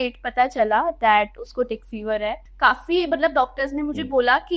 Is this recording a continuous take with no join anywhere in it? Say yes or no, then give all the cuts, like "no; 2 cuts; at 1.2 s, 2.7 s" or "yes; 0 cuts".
no; 1 cut; at 2.5 s